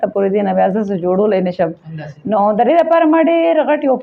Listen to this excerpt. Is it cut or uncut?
uncut